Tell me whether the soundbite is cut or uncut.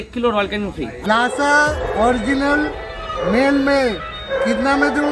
cut